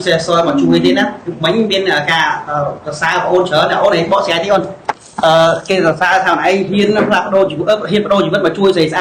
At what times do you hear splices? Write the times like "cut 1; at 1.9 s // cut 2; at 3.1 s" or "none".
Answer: none